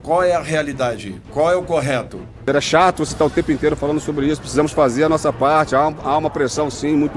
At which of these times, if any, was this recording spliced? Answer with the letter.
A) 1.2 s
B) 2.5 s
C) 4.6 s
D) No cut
B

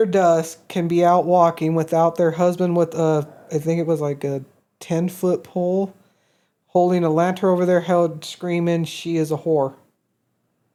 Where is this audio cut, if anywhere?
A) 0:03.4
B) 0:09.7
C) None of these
C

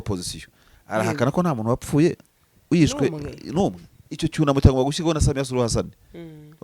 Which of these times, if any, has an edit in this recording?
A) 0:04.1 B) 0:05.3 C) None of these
A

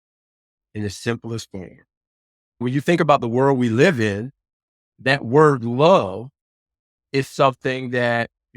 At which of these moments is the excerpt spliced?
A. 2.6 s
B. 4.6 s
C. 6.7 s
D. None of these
A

